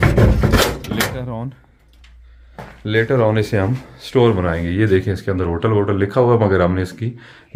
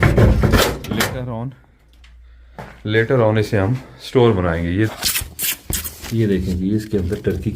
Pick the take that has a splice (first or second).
second